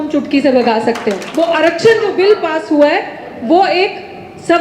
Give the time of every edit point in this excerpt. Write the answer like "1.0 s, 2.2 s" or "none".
1.2 s